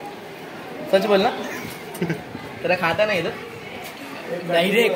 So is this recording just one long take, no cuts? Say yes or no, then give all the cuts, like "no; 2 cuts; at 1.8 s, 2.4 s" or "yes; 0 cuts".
yes; 0 cuts